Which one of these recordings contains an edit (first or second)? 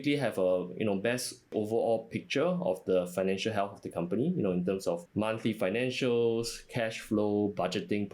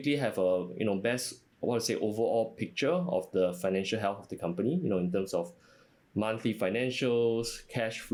first